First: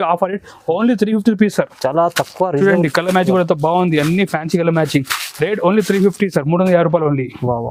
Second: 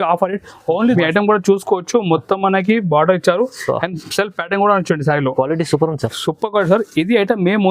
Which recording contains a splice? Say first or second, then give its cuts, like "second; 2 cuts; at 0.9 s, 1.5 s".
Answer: second; 1 cut; at 1.0 s